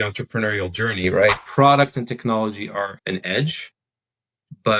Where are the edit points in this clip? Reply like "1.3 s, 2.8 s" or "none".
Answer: 1.4 s